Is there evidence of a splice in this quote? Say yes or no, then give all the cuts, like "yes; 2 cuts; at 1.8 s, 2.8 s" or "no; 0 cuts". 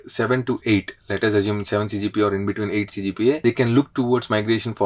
no; 0 cuts